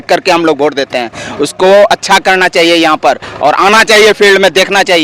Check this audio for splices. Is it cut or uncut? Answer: uncut